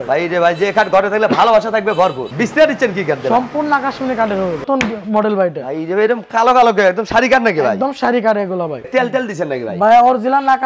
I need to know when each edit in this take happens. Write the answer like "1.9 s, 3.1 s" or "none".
2.3 s, 4.6 s, 8.8 s